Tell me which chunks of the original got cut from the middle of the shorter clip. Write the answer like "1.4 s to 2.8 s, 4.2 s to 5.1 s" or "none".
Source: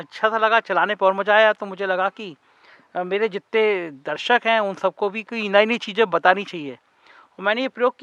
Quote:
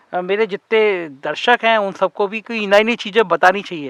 none